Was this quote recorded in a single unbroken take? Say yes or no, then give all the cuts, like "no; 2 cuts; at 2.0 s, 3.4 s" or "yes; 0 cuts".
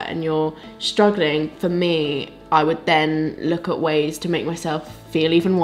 yes; 0 cuts